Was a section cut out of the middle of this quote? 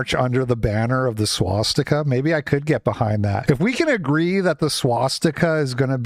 no; 0 cuts

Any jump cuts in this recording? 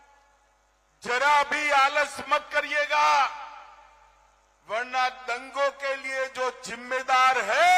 no; 0 cuts

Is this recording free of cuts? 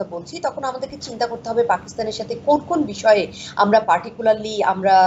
yes; 0 cuts

